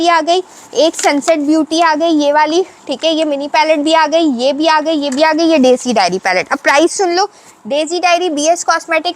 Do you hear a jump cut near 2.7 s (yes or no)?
no